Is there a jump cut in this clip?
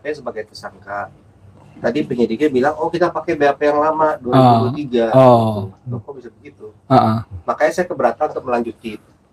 no; 0 cuts

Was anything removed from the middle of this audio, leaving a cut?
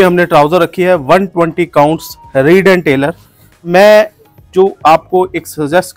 yes; 1 cut; at 3.6 s

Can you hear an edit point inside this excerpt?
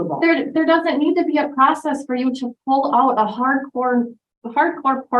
no; 0 cuts

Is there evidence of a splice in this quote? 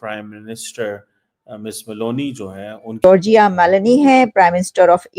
yes; 1 cut; at 3.0 s

